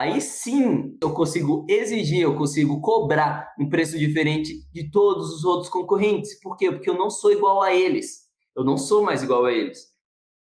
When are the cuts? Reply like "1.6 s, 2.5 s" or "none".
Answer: 1.0 s